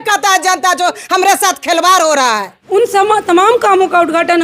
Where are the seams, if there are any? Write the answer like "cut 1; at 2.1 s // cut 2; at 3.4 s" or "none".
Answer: cut 1; at 2.5 s